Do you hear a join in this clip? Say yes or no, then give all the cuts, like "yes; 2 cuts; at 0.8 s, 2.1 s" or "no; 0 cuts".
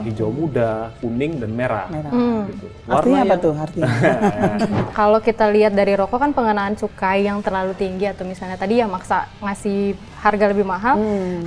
yes; 1 cut; at 4.8 s